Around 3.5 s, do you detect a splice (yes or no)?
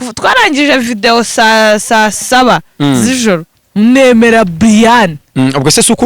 yes